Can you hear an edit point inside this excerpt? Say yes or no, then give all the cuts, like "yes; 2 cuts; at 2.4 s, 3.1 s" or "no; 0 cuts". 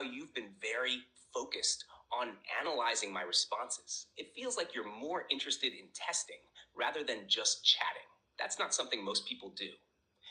no; 0 cuts